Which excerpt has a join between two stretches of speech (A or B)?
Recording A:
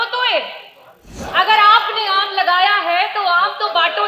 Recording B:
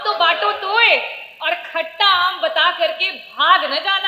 A